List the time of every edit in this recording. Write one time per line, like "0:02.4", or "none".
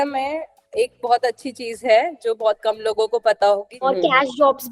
0:03.7